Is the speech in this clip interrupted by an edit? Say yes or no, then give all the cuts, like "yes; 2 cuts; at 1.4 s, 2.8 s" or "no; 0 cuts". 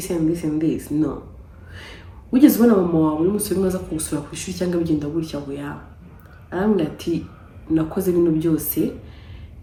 no; 0 cuts